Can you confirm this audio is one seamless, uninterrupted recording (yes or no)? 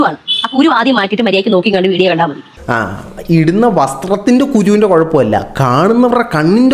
yes